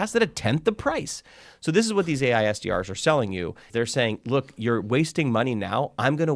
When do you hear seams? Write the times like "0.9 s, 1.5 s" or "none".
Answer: 3.7 s